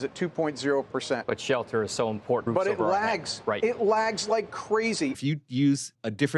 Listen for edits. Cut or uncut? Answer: cut